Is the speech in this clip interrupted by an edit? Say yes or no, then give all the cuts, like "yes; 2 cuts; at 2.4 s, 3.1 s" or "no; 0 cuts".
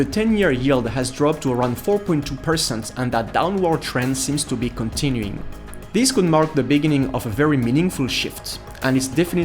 no; 0 cuts